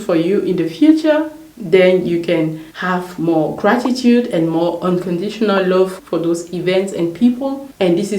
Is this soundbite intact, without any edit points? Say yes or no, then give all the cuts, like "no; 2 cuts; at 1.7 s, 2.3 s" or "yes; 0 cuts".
no; 1 cut; at 5.9 s